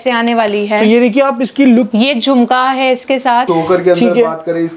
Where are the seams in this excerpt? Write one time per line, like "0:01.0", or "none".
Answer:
0:01.9
0:03.4